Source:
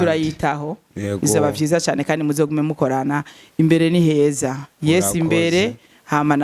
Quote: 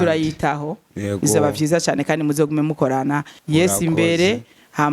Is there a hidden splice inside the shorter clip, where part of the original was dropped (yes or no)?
yes